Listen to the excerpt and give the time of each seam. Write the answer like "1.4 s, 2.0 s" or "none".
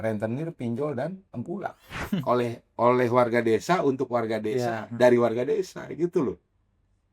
2.0 s